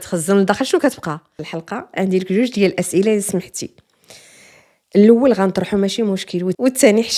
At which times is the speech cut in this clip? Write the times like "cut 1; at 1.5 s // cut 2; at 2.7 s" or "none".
cut 1; at 1.5 s